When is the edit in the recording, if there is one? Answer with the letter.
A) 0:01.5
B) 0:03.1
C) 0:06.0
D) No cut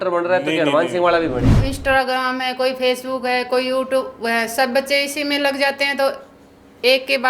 A